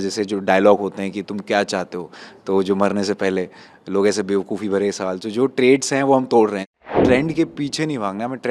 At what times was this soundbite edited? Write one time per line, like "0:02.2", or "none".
0:06.9